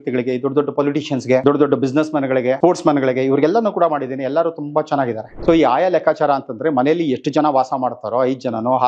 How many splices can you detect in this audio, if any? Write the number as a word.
three